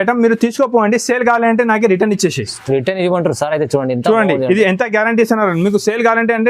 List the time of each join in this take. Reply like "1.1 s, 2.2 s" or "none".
none